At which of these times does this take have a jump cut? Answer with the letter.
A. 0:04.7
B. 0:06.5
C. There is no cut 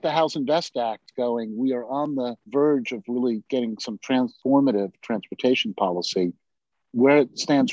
C